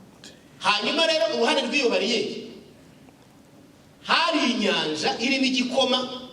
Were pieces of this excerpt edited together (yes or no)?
no